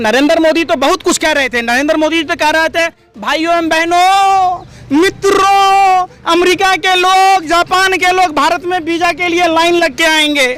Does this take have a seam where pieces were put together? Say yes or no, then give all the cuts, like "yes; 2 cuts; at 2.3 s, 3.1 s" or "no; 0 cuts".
no; 0 cuts